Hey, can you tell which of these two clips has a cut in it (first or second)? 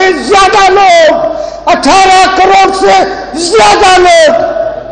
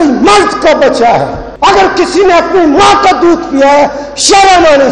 second